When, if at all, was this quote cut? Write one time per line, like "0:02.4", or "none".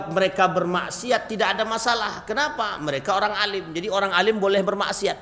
none